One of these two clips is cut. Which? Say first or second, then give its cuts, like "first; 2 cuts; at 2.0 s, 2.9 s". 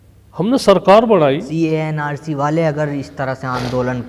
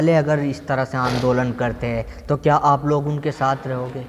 first; 1 cut; at 1.5 s